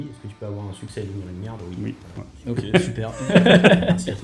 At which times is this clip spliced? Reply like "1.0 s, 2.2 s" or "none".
3.2 s